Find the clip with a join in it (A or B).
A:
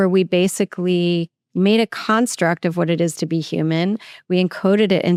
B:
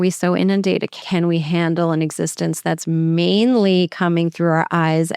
B